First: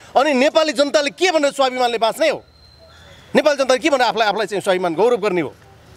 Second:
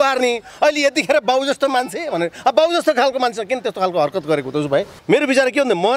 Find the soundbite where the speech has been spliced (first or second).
second